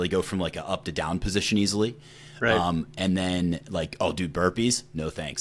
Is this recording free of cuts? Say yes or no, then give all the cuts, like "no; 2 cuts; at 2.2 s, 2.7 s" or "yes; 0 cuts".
yes; 0 cuts